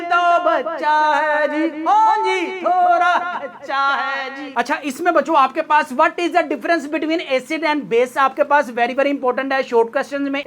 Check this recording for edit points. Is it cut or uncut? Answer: uncut